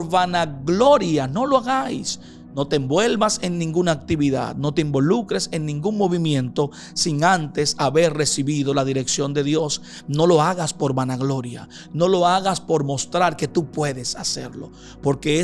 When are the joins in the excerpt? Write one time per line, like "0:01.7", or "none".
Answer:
none